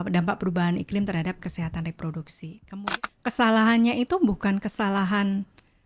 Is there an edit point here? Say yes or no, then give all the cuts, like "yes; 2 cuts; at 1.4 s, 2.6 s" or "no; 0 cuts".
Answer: yes; 1 cut; at 2.8 s